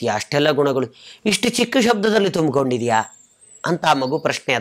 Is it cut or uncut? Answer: uncut